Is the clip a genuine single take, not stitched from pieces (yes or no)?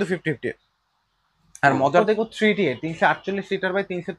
no